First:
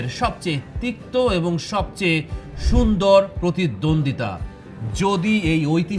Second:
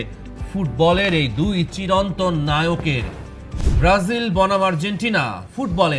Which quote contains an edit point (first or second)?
second